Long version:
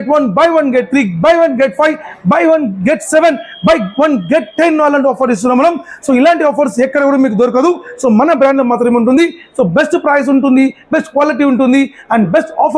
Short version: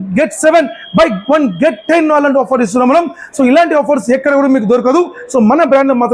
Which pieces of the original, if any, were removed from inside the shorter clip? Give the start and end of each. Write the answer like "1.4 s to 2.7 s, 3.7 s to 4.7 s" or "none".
none